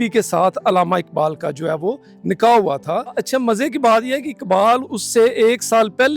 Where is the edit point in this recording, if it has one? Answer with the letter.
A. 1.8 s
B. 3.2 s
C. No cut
B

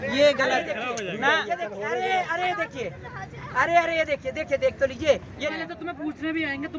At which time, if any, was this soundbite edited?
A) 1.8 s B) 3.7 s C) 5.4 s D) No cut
C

